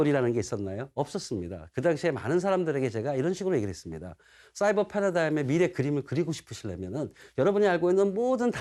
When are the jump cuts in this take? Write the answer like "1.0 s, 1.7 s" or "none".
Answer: none